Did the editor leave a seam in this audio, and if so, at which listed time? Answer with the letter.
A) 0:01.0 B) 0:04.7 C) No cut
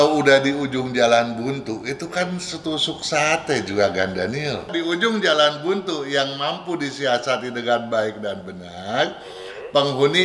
B